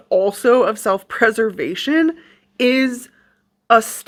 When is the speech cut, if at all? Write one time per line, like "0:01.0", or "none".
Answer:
none